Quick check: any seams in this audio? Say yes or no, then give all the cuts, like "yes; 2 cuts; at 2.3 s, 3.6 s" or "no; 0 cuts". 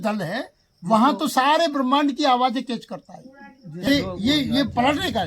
yes; 1 cut; at 3.9 s